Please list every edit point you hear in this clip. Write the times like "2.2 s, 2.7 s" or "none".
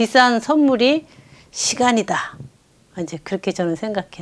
none